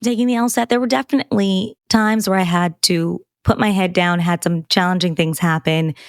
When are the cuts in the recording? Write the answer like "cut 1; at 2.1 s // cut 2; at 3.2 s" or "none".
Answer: cut 1; at 1.7 s